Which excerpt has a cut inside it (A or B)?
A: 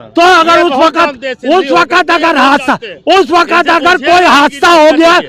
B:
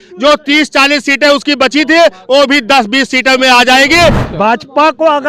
B